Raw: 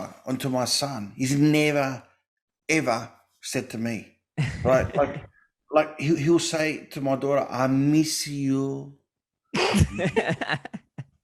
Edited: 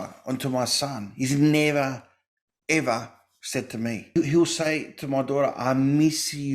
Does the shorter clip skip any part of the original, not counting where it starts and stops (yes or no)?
yes